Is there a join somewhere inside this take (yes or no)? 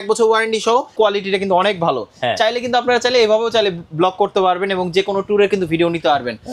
yes